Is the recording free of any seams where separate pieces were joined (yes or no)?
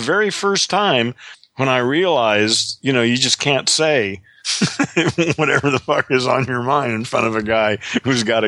yes